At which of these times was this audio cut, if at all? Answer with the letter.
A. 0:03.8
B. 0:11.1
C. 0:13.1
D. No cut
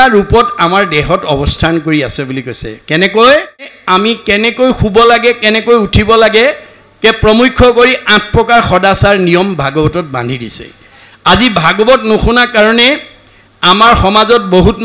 A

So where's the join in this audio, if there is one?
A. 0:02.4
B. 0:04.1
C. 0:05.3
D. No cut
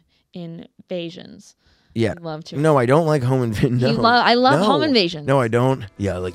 D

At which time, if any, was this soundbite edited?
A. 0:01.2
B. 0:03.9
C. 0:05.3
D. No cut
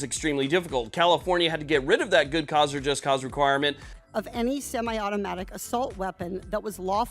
B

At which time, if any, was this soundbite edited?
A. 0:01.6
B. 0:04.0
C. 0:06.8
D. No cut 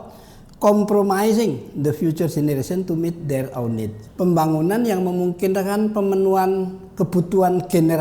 B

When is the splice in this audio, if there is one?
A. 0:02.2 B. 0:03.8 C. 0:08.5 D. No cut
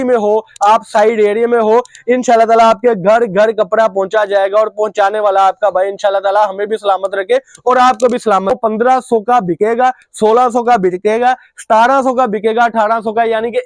C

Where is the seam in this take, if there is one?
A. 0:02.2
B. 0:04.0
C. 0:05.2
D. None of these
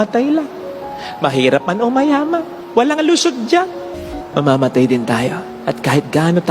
B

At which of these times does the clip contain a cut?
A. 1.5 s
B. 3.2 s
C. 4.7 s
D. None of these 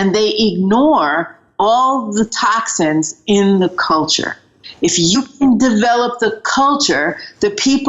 C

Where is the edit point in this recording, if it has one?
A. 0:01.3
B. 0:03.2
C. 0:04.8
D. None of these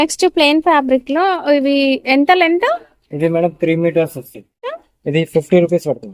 C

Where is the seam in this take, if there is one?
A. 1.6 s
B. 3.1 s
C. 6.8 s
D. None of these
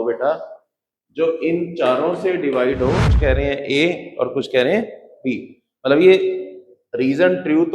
B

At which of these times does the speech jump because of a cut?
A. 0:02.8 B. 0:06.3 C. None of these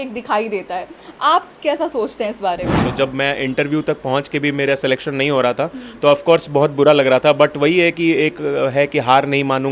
A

